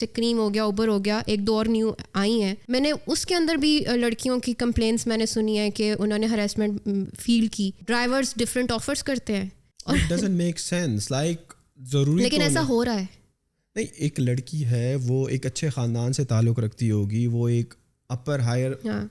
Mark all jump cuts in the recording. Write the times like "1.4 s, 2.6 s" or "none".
2.6 s, 7.8 s, 9.7 s